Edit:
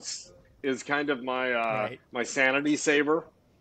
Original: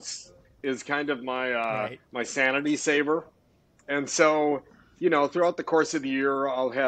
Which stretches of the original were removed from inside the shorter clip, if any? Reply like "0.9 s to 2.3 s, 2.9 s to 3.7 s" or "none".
none